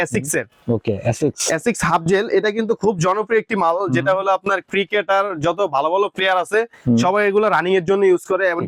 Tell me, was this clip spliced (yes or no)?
no